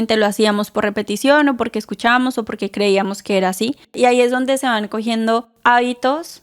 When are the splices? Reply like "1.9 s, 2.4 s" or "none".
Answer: 3.9 s, 5.5 s